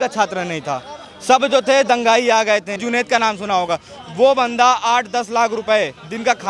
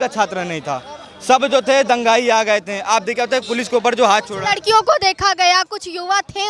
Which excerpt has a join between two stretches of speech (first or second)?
first